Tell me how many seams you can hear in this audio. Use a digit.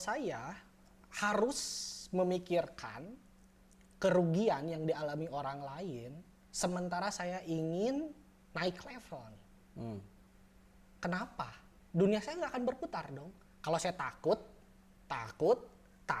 0